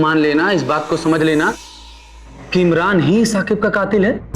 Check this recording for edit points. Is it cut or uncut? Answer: uncut